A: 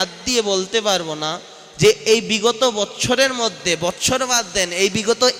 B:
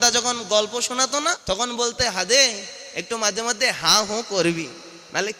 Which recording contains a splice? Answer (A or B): B